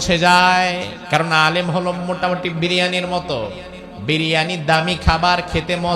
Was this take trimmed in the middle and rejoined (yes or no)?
yes